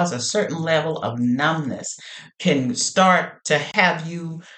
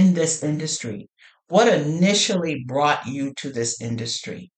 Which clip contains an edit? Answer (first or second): first